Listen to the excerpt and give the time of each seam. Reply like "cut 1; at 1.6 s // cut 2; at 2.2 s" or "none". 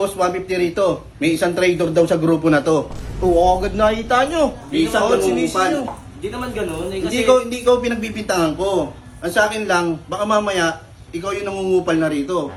none